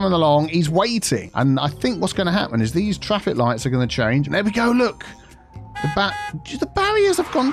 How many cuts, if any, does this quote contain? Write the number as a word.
two